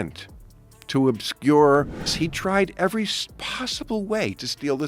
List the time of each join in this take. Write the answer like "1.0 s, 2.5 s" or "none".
2.0 s